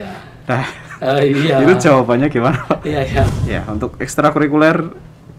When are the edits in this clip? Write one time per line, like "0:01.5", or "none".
0:03.4